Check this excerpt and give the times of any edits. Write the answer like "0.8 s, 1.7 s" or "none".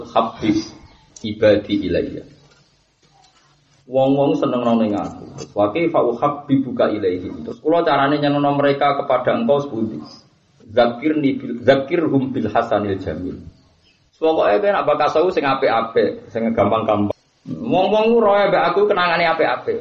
17.1 s

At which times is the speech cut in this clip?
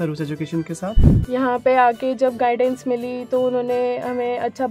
1.1 s

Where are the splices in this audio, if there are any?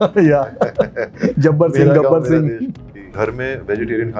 3.1 s

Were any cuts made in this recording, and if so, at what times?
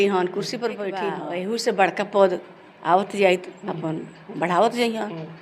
1.2 s

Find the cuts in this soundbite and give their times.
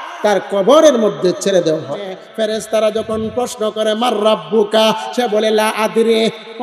2.2 s

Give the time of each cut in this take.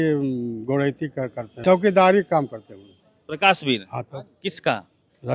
1.6 s

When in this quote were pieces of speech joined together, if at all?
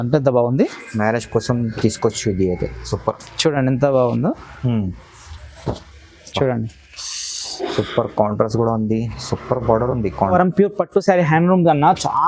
10.3 s

